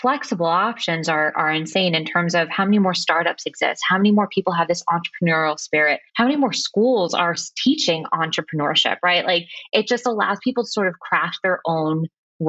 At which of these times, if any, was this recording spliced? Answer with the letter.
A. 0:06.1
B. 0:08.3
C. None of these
A